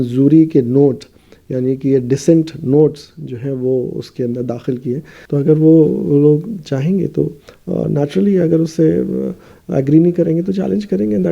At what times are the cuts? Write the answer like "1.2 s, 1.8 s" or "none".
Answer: 5.1 s

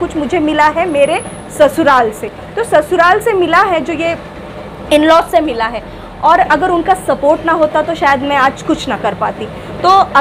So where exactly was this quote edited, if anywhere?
none

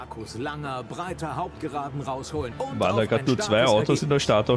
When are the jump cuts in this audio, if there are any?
2.5 s

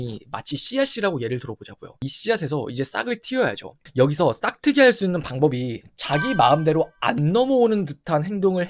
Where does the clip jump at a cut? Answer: 2.1 s

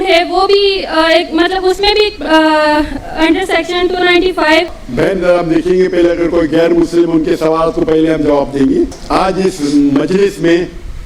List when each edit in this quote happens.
4.8 s, 9.0 s

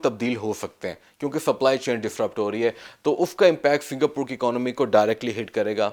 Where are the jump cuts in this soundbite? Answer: none

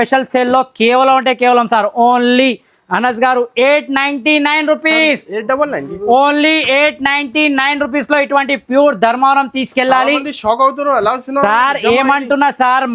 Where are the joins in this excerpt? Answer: none

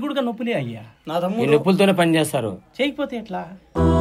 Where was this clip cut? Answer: none

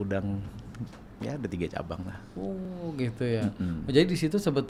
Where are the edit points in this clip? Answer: none

